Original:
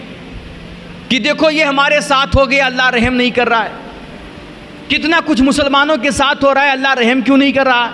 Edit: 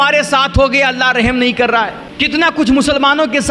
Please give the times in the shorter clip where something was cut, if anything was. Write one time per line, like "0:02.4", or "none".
0:02.0